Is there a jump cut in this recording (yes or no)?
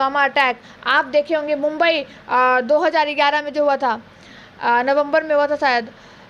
no